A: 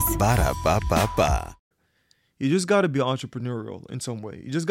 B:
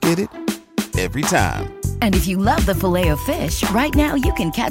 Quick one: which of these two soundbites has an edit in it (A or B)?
A